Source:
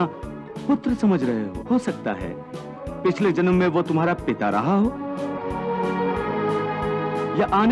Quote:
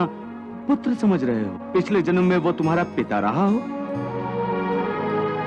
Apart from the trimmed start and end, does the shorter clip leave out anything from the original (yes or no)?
yes